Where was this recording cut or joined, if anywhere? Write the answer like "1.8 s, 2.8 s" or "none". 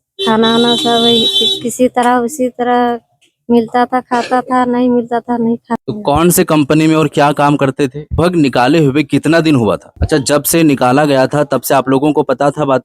5.8 s, 8.1 s, 9.9 s